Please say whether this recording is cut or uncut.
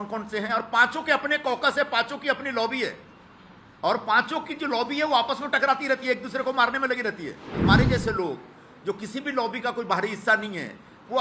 cut